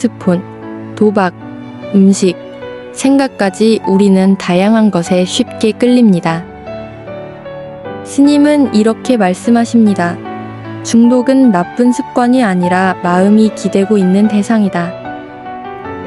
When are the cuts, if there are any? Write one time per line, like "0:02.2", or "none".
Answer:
0:15.0